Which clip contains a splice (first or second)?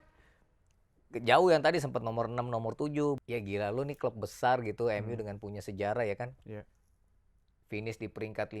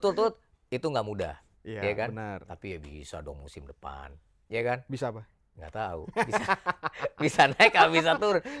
first